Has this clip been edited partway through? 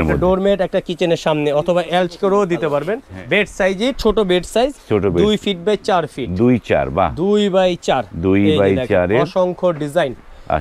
yes; 1 cut; at 3.0 s

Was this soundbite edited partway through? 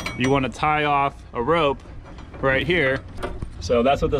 yes; 1 cut; at 3.2 s

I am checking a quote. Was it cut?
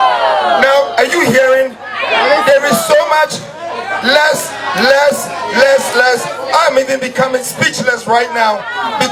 no; 0 cuts

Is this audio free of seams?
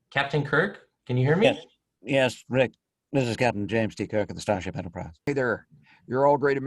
no; 1 cut; at 5.2 s

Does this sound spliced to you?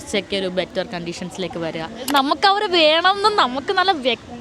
yes; 1 cut; at 2.1 s

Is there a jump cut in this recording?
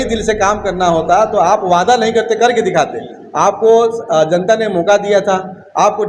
no; 0 cuts

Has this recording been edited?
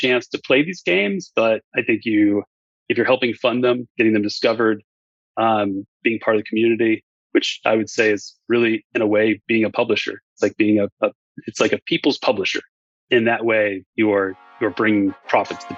no; 0 cuts

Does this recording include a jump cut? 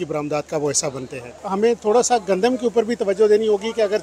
yes; 1 cut; at 1.5 s

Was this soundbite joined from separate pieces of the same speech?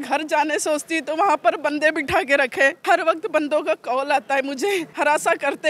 yes; 2 cuts; at 2.8 s, 4.9 s

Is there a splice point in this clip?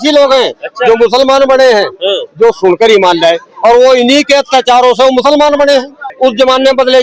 yes; 1 cut; at 6.0 s

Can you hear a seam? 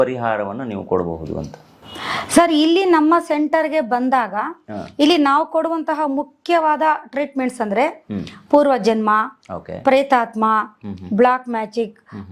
no; 0 cuts

